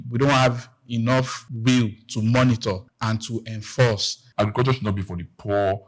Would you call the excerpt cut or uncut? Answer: cut